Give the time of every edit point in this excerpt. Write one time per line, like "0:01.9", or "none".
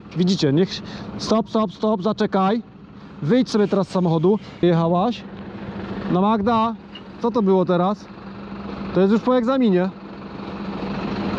0:04.6